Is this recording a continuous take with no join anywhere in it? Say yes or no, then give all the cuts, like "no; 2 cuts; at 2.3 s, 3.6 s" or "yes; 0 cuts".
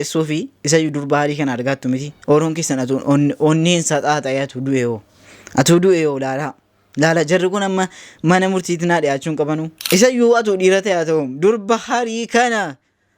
no; 2 cuts; at 2.1 s, 9.7 s